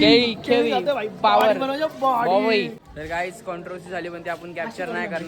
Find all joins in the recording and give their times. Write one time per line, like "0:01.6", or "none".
0:02.9

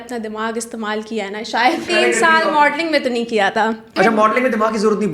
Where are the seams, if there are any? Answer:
0:01.9
0:03.9

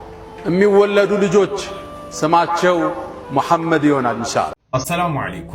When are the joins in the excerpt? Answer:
0:04.6

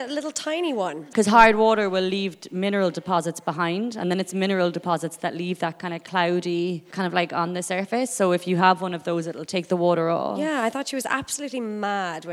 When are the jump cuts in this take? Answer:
0:01.0
0:06.8

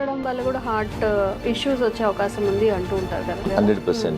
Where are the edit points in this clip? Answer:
0:01.4
0:03.4

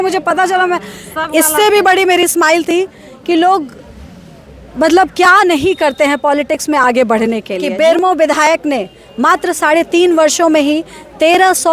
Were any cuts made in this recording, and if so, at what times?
0:07.6

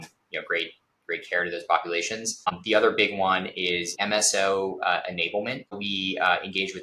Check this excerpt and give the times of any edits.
0:02.4
0:04.0
0:05.7

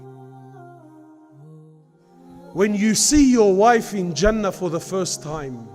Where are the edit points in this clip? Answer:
0:01.6

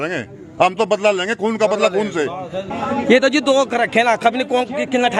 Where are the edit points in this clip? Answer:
0:02.7

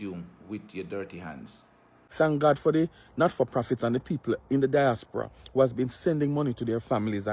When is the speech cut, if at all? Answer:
0:02.0

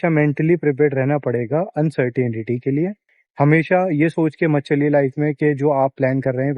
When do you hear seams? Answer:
none

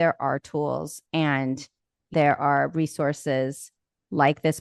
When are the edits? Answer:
0:02.0

